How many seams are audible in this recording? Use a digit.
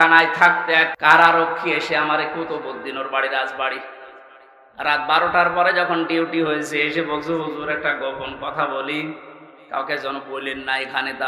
1